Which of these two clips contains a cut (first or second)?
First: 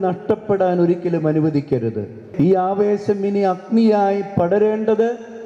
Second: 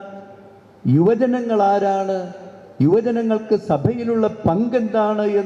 first